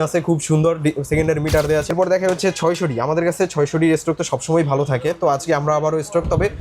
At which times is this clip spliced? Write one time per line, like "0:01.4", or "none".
0:01.9